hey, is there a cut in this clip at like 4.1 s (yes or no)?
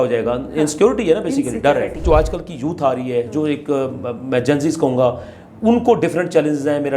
no